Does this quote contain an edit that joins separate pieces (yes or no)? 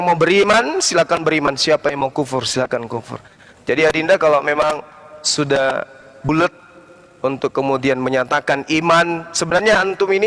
no